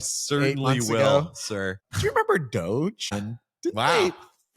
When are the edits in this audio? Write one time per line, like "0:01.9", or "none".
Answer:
0:01.8
0:03.2